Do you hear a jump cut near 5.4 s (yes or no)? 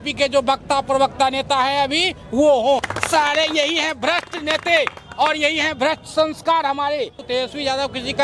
no